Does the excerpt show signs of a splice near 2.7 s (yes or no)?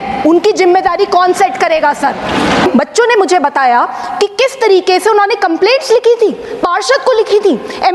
yes